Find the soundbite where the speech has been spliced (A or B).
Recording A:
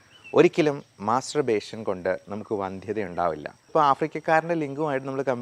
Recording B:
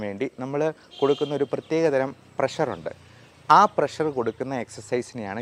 A